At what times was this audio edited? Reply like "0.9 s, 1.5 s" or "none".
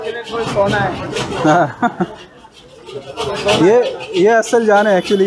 none